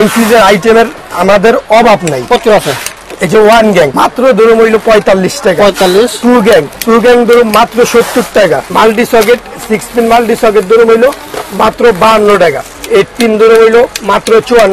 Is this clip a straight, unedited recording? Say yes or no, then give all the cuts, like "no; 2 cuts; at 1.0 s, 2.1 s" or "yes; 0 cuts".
no; 4 cuts; at 3.9 s, 6.7 s, 8.7 s, 12.7 s